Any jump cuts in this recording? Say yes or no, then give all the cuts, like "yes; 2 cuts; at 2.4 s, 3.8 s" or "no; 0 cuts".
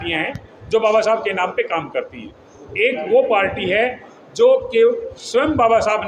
no; 0 cuts